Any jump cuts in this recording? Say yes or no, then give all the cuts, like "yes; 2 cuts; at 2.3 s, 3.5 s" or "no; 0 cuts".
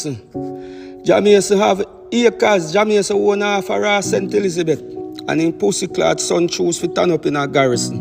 no; 0 cuts